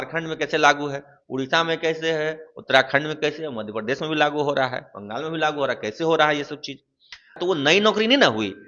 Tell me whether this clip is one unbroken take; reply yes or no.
no